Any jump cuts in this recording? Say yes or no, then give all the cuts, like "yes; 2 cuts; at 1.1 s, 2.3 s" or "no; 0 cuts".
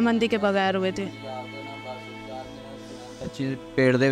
no; 0 cuts